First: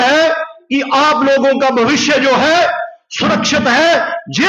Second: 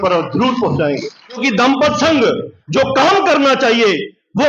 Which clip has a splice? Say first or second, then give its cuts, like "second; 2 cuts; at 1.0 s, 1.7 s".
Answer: second; 1 cut; at 1.4 s